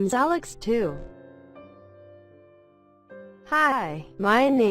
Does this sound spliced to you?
yes; 2 cuts; at 0.9 s, 3.5 s

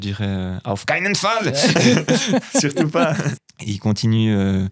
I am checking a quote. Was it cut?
yes; 1 cut; at 3.3 s

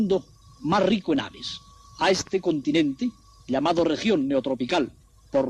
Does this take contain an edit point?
yes; 1 cut; at 2.5 s

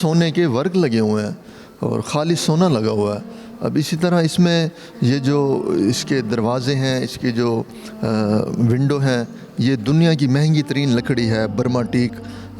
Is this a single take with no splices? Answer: yes; 0 cuts

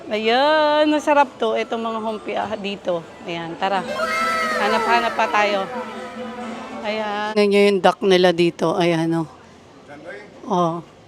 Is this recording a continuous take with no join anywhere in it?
no; 1 cut; at 7.3 s

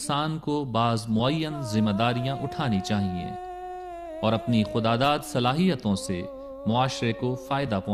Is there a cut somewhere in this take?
yes; 1 cut; at 4.4 s

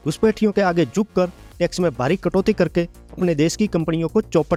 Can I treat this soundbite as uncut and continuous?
yes; 0 cuts

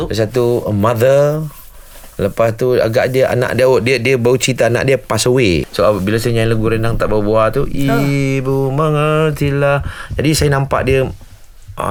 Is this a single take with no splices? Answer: yes; 0 cuts

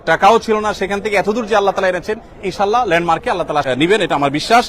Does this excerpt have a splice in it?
yes; 1 cut; at 3.6 s

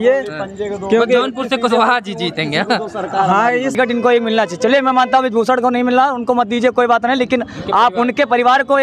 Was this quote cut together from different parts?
yes; 1 cut; at 3.7 s

